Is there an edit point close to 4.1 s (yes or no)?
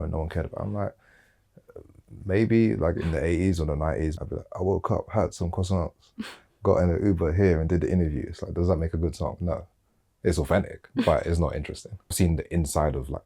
yes